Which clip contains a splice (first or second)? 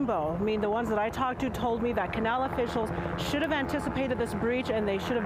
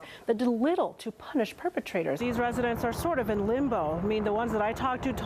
second